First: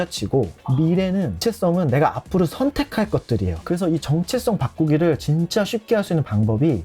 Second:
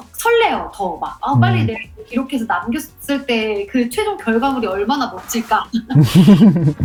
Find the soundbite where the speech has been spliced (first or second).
first